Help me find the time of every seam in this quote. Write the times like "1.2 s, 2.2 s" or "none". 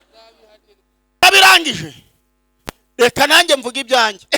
1.2 s